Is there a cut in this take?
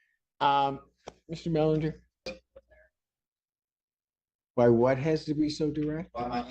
yes; 1 cut; at 2.3 s

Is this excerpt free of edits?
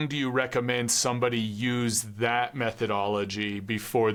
yes; 0 cuts

